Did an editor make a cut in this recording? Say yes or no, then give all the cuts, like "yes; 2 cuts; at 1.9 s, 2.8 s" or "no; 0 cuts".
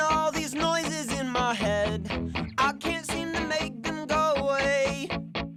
no; 0 cuts